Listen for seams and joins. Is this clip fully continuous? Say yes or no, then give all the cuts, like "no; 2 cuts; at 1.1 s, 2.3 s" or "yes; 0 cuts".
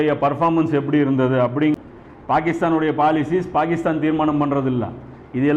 no; 1 cut; at 1.7 s